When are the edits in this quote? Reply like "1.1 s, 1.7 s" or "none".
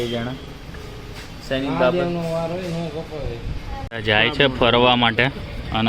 3.9 s